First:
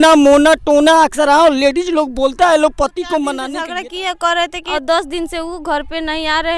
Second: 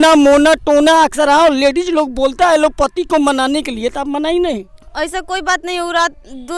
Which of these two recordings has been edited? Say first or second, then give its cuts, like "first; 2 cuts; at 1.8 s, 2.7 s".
first; 2 cuts; at 3.5 s, 4.6 s